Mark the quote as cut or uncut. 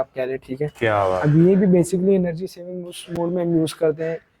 uncut